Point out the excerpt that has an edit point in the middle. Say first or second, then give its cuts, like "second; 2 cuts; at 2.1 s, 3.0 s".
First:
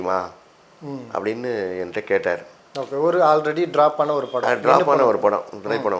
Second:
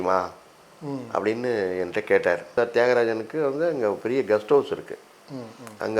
second; 1 cut; at 2.5 s